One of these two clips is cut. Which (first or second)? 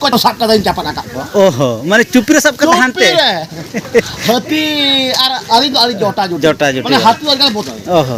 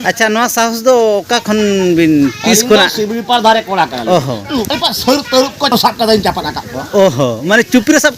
second